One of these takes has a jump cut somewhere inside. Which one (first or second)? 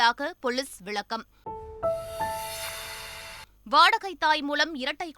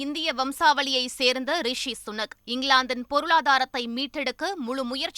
first